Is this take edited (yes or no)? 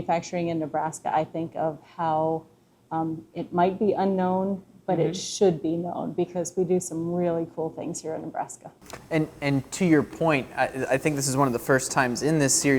no